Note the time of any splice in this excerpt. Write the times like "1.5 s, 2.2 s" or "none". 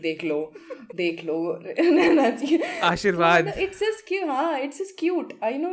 none